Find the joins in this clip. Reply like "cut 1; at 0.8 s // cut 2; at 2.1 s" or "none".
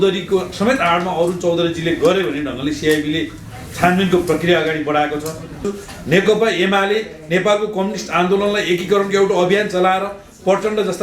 cut 1; at 5.7 s